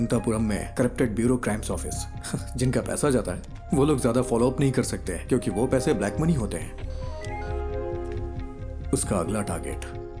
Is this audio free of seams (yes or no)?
yes